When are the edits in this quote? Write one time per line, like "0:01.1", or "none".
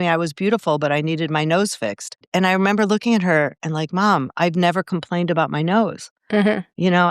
0:02.3